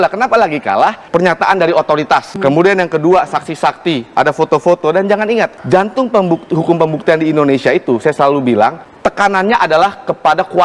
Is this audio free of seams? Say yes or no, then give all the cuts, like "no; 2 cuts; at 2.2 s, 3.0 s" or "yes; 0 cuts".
no; 4 cuts; at 1.0 s, 2.3 s, 5.6 s, 8.9 s